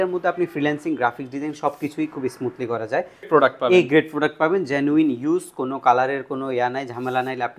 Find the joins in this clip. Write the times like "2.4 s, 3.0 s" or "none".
3.2 s